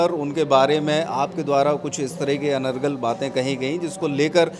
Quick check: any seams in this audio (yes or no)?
no